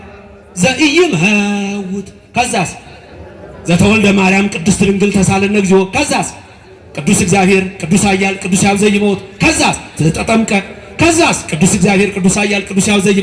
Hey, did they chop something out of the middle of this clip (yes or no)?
no